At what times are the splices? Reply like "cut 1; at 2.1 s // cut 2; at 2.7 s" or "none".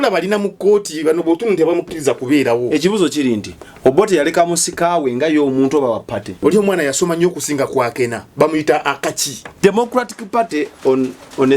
cut 1; at 6.4 s // cut 2; at 9.6 s